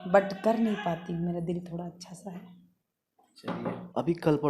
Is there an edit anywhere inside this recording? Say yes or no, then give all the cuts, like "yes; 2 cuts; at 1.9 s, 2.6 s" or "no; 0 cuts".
no; 0 cuts